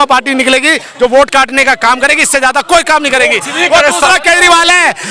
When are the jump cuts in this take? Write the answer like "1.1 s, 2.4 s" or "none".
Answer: none

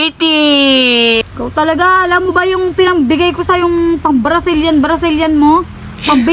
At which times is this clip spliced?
1.2 s

